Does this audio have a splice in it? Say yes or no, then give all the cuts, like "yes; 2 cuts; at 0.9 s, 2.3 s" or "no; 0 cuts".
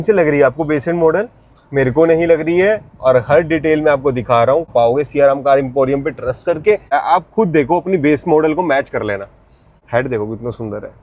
yes; 3 cuts; at 4.7 s, 6.9 s, 9.8 s